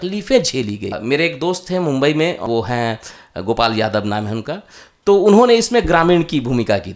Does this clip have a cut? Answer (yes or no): yes